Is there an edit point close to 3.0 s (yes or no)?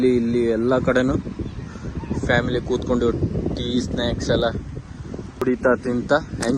no